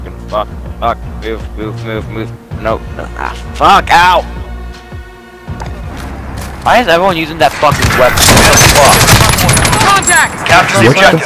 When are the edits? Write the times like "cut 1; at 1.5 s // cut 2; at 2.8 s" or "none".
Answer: cut 1; at 5.9 s